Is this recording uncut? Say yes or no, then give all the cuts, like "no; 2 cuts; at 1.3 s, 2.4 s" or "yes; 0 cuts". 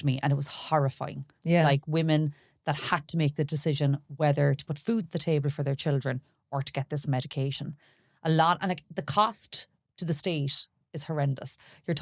yes; 0 cuts